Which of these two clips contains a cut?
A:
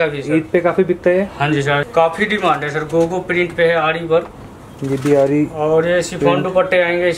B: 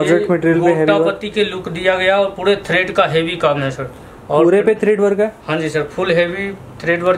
A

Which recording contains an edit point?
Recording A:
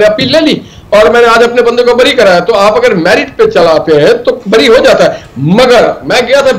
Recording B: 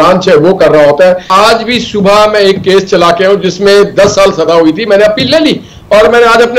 B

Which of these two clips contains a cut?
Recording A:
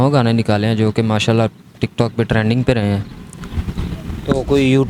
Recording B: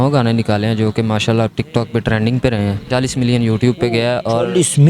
B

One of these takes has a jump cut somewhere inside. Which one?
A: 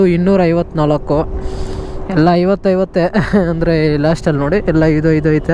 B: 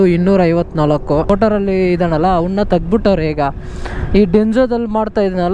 B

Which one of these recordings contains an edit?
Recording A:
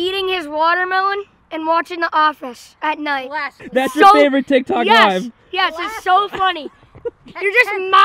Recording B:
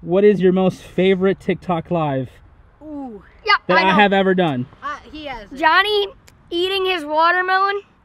A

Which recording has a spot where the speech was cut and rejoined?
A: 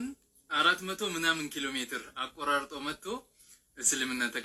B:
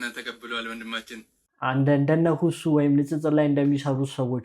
B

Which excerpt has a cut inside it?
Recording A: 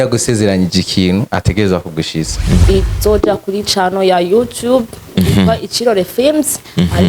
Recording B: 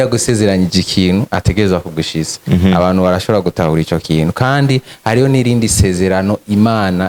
A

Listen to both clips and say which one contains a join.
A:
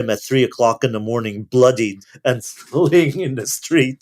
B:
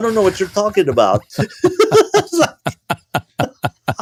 A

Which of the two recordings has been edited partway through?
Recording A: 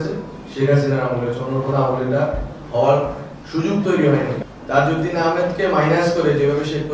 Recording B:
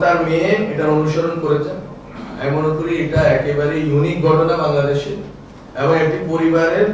A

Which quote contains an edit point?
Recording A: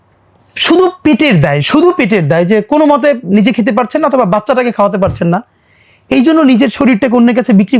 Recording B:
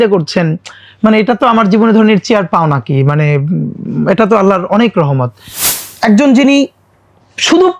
B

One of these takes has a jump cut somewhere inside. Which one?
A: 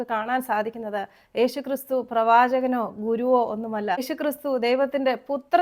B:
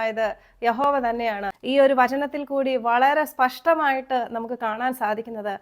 B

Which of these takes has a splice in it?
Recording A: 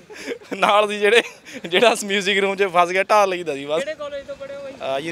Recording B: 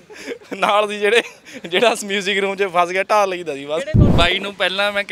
B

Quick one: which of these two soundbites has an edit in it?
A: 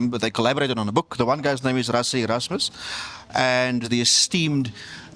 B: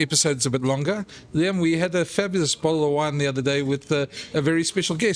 A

